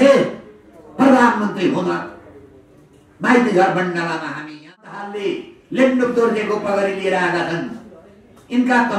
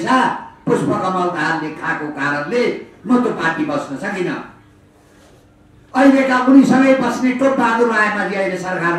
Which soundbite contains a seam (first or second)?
first